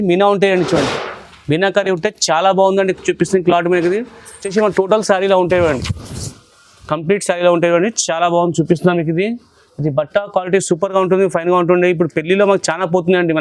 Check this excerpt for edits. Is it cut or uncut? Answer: cut